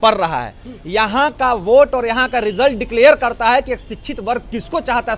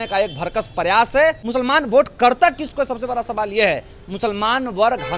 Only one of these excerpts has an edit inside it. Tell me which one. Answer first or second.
second